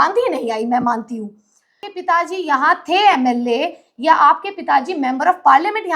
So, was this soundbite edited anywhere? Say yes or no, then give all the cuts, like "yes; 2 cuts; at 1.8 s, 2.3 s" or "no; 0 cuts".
yes; 1 cut; at 1.9 s